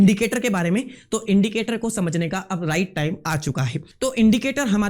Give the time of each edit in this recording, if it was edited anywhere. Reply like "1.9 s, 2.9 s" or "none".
3.8 s